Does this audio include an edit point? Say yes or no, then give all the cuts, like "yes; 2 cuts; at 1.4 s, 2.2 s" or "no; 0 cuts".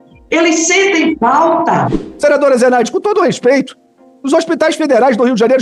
yes; 1 cut; at 2.0 s